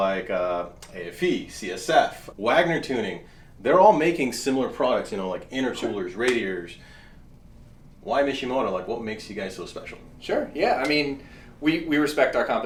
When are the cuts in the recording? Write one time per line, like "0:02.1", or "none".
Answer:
none